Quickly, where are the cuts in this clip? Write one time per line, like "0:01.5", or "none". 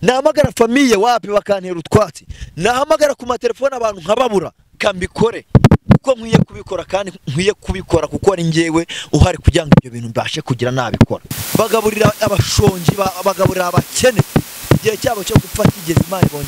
0:04.8
0:11.2